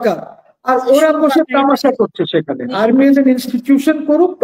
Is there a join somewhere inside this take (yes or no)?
yes